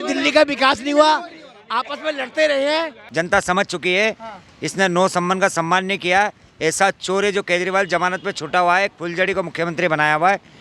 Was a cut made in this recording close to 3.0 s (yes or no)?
yes